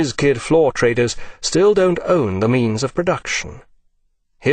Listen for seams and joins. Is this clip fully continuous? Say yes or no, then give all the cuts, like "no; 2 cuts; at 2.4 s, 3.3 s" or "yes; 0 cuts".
no; 1 cut; at 1.9 s